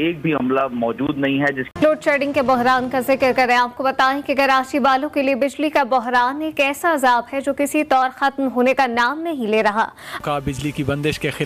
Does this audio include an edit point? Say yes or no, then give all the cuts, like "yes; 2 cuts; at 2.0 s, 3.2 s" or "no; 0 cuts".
yes; 2 cuts; at 1.7 s, 10.0 s